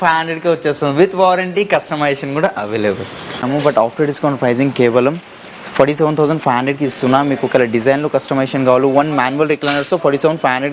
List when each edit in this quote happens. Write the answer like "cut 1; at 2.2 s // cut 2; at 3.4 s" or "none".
cut 1; at 3.4 s